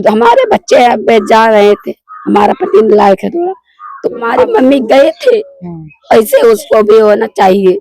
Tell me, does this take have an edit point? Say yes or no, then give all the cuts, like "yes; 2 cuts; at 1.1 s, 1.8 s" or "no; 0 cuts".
yes; 1 cut; at 4.3 s